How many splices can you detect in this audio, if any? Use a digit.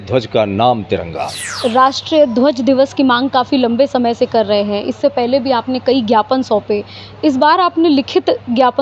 1